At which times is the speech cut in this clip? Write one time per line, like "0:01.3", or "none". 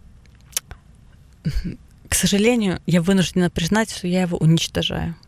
none

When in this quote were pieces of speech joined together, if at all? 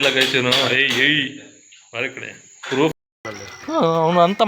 0:03.0

